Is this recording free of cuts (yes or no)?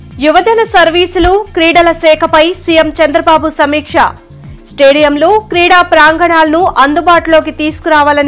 yes